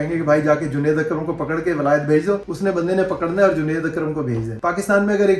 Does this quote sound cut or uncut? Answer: cut